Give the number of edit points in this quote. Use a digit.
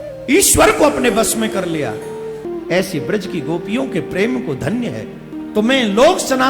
2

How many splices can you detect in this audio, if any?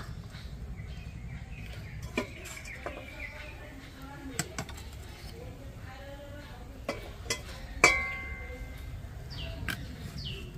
0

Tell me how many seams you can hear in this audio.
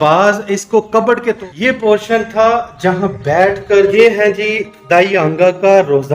2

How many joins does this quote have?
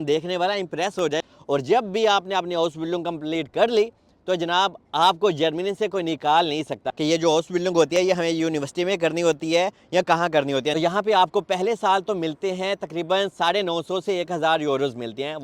3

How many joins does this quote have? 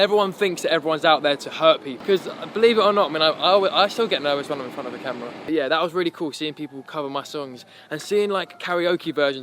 2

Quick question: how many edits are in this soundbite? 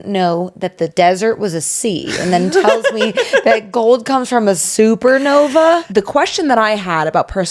2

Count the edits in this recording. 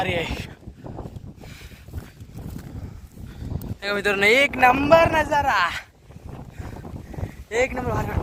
0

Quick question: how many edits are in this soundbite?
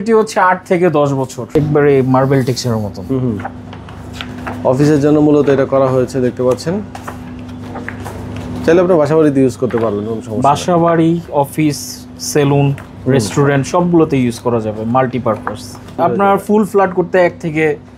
2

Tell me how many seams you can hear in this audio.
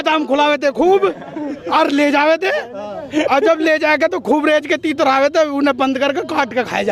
0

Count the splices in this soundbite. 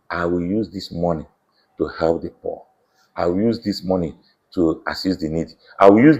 0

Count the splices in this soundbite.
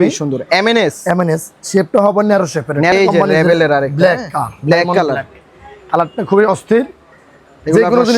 1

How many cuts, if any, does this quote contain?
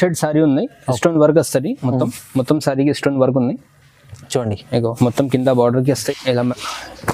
1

